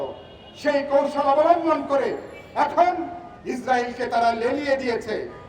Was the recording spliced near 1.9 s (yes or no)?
no